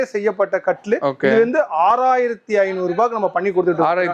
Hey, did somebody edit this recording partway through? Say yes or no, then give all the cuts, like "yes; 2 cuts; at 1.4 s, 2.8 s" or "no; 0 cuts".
no; 0 cuts